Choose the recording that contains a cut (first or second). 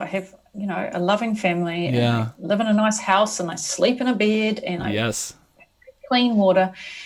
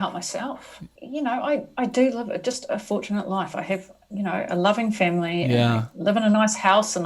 second